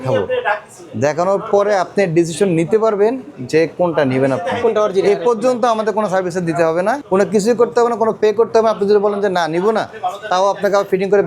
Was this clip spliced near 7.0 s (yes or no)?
yes